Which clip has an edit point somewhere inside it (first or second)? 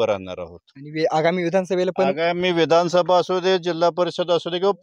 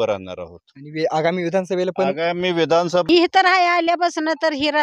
second